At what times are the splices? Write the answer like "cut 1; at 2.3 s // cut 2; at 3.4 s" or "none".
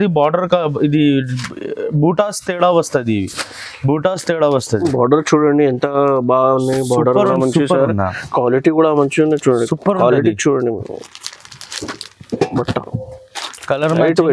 cut 1; at 7.3 s